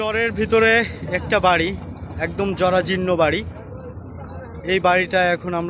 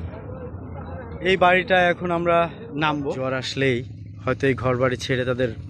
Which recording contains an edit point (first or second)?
second